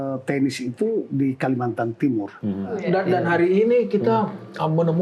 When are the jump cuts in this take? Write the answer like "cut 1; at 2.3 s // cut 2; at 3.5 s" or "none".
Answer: cut 1; at 2.8 s

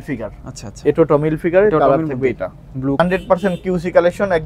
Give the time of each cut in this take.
cut 1; at 3.0 s

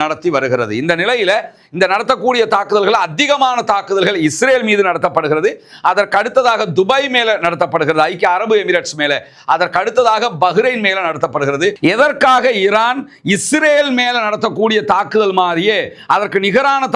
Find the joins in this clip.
cut 1; at 11.8 s

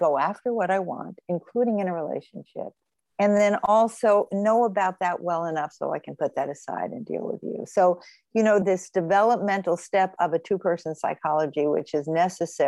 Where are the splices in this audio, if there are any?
none

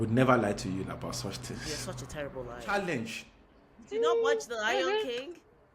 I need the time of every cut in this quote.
cut 1; at 2.6 s

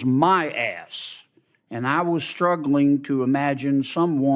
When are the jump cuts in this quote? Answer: none

